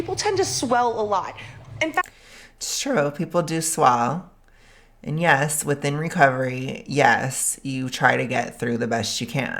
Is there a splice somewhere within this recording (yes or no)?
no